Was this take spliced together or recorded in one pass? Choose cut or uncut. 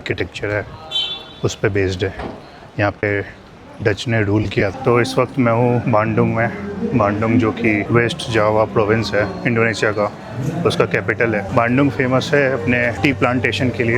cut